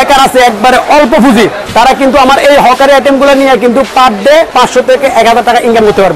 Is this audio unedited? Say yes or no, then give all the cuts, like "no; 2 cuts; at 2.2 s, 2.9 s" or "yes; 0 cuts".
no; 1 cut; at 4.5 s